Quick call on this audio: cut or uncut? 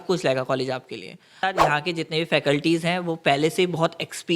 cut